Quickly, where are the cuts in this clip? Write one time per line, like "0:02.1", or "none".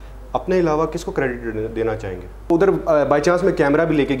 0:02.5